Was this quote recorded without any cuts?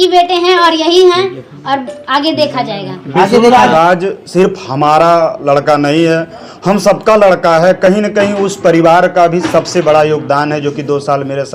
no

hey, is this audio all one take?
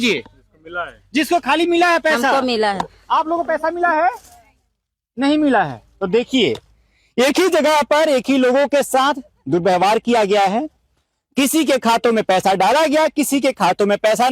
yes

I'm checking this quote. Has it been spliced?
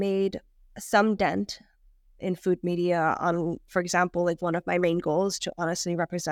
no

